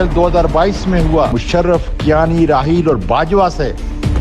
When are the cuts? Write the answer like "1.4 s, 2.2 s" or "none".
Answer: 1.4 s

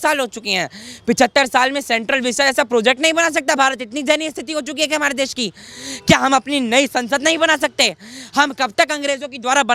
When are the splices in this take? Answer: none

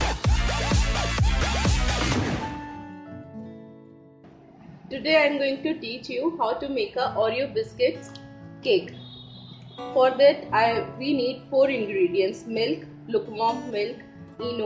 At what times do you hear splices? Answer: 2.4 s, 4.9 s

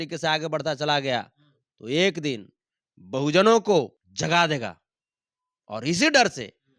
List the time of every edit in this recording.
4.0 s

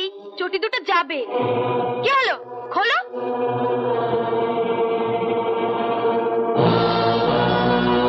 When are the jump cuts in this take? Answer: none

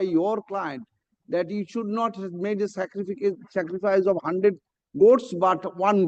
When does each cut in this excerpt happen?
none

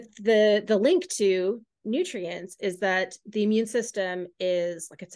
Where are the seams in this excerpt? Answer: none

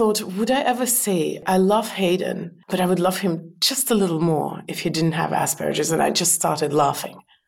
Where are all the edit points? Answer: 1.4 s, 2.5 s

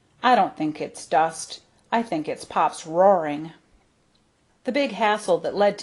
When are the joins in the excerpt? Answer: 3.7 s

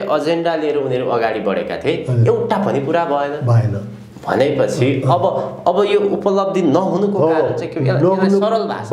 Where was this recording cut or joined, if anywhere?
none

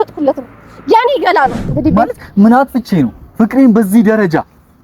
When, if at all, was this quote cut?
1.6 s

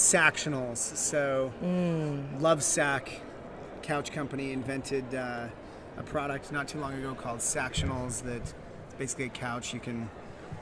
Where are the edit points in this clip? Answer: 9.6 s

